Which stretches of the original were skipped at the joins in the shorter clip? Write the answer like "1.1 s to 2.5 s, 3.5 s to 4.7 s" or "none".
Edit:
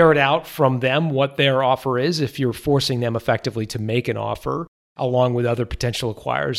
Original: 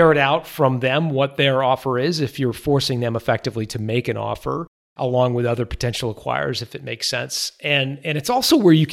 none